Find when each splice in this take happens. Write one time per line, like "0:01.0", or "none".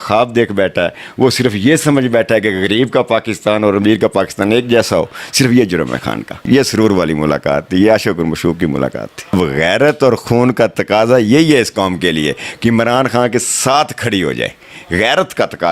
0:06.4
0:09.3